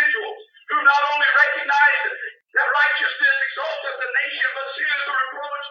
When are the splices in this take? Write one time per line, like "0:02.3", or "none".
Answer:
none